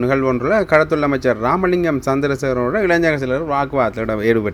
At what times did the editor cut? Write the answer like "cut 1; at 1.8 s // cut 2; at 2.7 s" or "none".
none